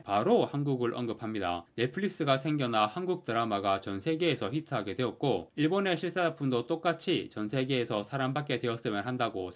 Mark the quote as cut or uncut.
uncut